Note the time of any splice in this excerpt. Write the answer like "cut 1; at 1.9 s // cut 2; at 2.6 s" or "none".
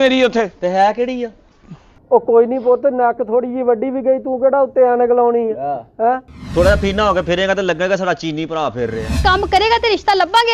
cut 1; at 9.1 s

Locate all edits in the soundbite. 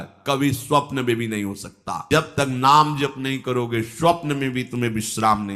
cut 1; at 1.9 s

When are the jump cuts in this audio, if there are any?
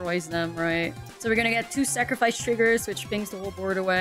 cut 1; at 1.1 s

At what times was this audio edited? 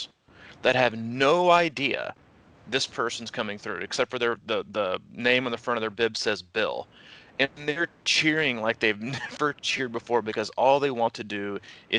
none

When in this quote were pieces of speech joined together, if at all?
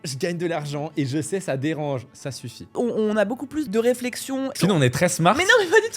cut 1; at 2.7 s // cut 2; at 3.7 s // cut 3; at 4.5 s

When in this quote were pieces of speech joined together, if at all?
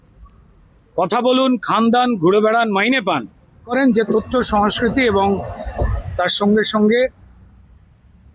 cut 1; at 3.7 s

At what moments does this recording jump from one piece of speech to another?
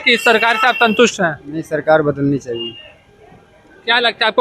none

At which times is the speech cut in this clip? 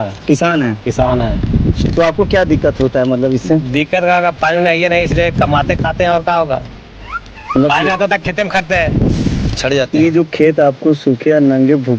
cut 1; at 9.6 s

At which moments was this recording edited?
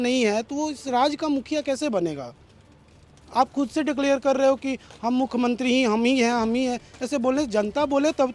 none

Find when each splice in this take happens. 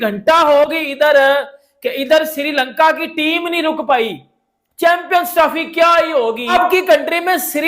cut 1; at 6.5 s

